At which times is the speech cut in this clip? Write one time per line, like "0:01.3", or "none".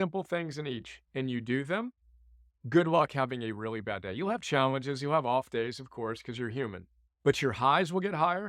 none